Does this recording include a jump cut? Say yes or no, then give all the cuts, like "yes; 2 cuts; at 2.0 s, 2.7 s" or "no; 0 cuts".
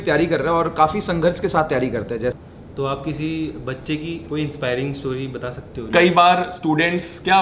yes; 2 cuts; at 2.3 s, 5.8 s